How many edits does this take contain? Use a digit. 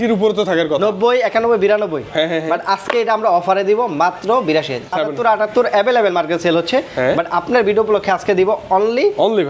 1